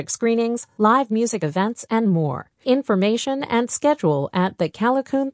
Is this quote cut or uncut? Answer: uncut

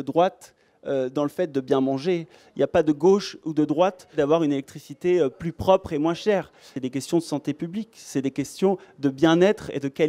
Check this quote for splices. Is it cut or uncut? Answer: cut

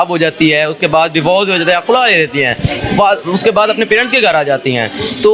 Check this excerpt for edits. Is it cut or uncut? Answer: uncut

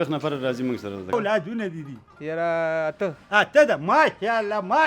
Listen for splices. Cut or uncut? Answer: cut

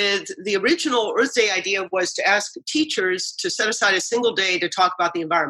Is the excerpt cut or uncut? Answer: uncut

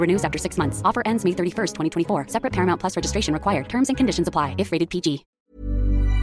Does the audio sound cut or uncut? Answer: cut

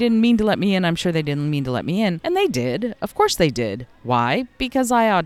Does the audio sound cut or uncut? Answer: cut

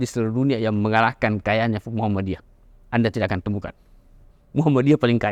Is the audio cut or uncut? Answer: uncut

